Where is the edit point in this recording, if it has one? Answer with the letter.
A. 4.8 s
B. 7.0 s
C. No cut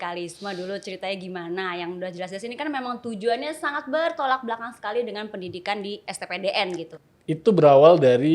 B